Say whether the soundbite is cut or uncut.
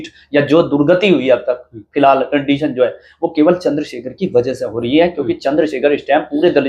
uncut